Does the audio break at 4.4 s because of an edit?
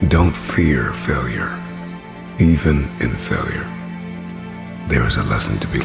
no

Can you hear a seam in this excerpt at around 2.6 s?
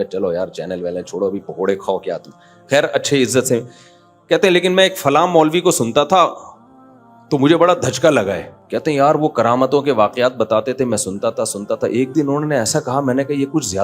no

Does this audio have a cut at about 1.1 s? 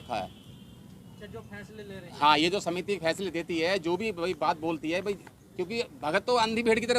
yes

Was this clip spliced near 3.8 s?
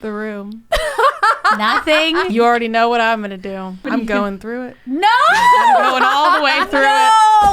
yes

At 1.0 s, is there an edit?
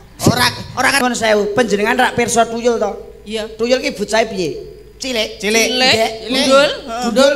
yes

